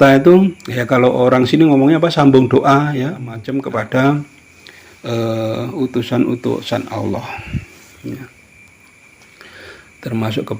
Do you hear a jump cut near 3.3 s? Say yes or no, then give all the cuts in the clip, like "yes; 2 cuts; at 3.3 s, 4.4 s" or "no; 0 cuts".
yes; 1 cut; at 3.3 s